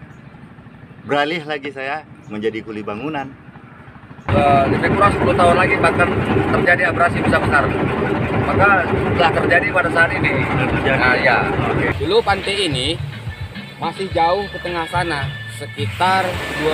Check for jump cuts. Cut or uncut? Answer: cut